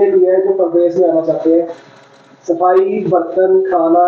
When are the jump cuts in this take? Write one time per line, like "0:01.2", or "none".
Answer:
none

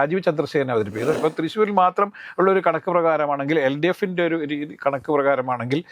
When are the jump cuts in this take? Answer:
0:01.2

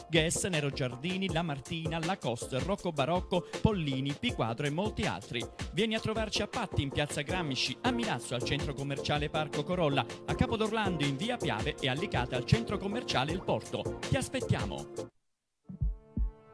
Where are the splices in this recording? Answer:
none

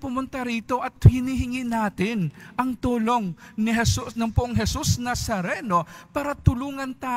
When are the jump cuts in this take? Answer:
none

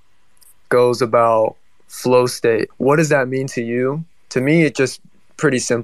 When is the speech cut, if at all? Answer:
0:02.7

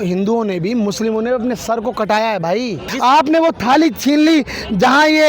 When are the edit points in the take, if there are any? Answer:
0:02.8

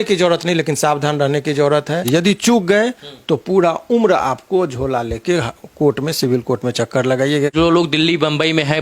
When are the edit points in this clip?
0:02.0
0:07.5

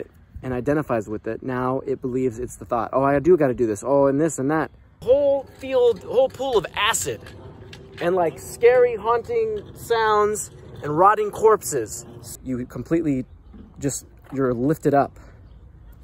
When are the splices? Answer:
0:04.9
0:12.3

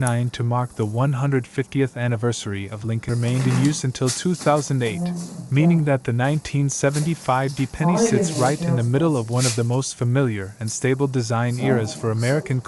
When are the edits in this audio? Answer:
0:03.1

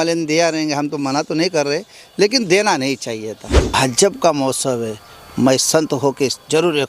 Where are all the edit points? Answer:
0:03.7

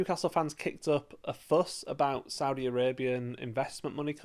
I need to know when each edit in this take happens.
none

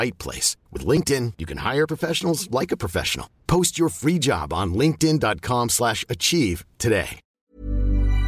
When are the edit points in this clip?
0:07.3

